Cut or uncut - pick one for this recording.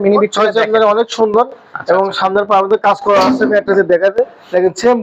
uncut